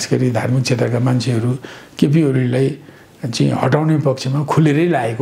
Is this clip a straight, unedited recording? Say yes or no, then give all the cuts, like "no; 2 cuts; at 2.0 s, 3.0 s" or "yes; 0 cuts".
yes; 0 cuts